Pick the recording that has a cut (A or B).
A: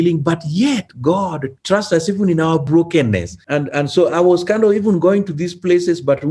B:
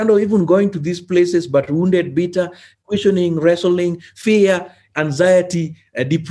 A